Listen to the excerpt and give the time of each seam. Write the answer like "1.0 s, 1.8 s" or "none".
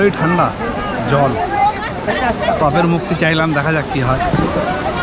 none

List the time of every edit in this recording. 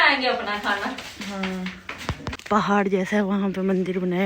2.4 s

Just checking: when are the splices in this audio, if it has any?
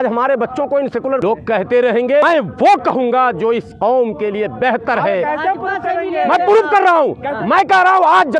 1.2 s, 2.2 s

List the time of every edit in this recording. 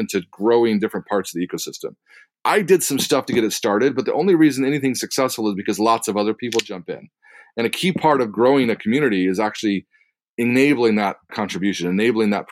2.2 s

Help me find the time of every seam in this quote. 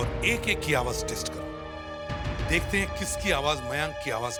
none

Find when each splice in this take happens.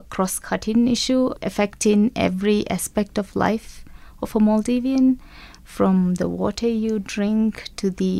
1.4 s

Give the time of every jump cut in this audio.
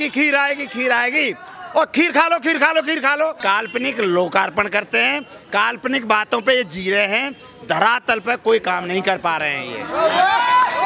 3.4 s

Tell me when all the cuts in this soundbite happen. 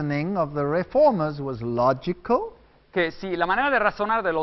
none

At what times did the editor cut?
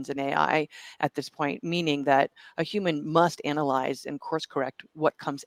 none

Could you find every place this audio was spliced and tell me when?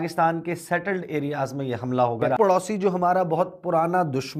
none

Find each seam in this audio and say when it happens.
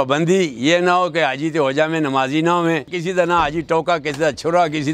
2.9 s

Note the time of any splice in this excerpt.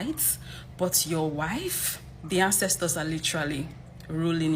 1.1 s

